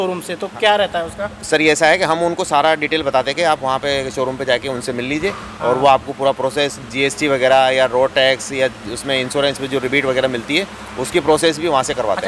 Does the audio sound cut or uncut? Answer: uncut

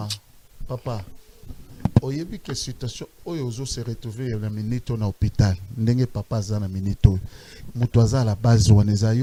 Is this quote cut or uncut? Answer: uncut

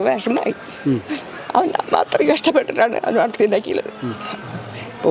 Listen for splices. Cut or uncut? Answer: uncut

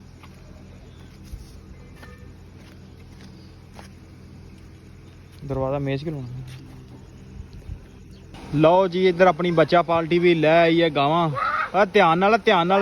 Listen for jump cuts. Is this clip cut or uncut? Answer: cut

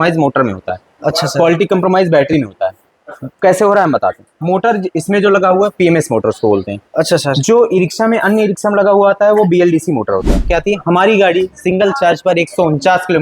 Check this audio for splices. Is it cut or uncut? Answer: cut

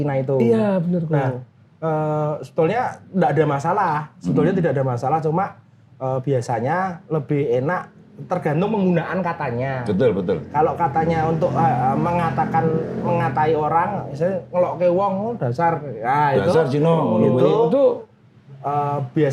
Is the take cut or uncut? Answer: uncut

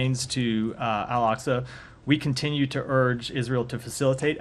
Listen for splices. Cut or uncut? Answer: cut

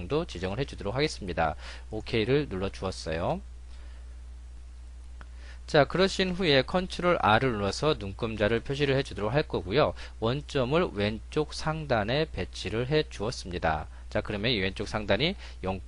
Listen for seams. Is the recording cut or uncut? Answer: cut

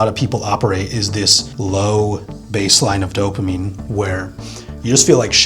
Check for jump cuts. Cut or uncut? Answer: cut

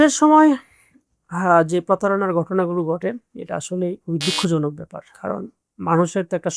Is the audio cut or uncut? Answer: uncut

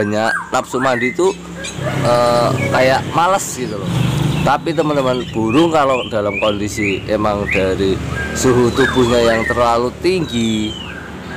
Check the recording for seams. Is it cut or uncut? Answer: cut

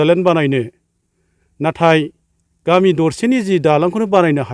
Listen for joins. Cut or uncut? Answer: uncut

